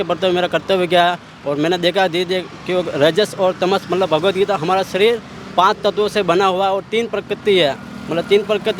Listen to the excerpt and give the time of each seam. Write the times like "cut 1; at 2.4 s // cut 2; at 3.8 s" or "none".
none